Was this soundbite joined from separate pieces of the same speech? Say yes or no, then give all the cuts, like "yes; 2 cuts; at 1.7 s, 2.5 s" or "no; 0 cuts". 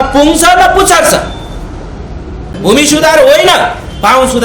yes; 1 cut; at 2.6 s